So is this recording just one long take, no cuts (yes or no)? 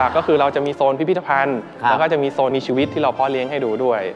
no